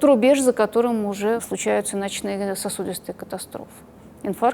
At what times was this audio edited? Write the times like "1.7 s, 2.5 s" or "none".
1.4 s